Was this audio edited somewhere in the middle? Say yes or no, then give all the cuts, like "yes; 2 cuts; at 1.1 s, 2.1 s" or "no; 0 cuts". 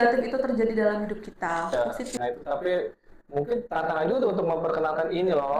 yes; 1 cut; at 1.7 s